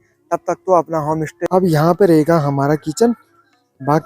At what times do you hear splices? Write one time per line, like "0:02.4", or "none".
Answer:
0:01.4